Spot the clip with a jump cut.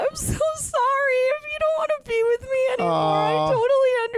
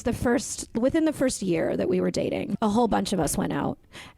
second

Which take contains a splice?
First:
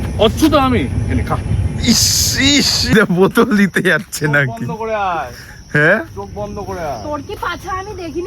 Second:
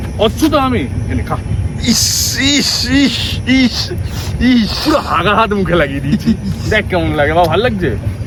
first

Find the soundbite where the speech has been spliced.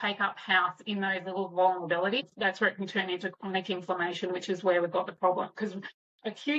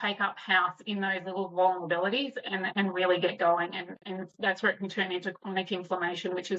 first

